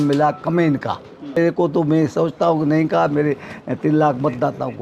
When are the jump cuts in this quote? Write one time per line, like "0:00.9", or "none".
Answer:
0:01.4